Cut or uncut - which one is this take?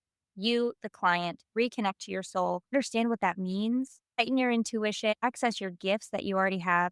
cut